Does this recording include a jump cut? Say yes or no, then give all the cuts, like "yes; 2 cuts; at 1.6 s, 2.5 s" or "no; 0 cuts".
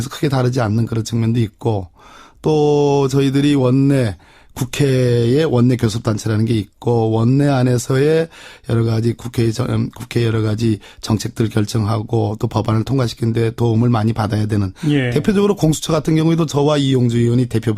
yes; 1 cut; at 3.0 s